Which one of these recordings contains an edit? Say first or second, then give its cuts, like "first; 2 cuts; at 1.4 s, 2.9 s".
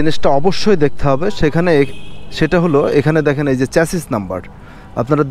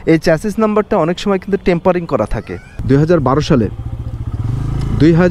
second; 1 cut; at 2.7 s